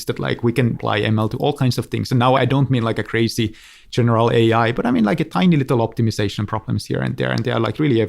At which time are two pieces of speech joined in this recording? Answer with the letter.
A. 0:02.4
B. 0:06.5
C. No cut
A